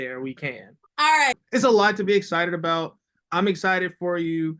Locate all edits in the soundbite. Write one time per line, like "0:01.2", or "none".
0:01.4